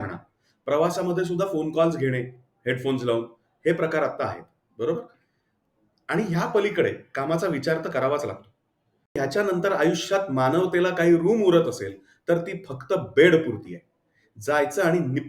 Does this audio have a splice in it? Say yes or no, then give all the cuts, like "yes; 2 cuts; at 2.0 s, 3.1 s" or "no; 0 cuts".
yes; 1 cut; at 9.2 s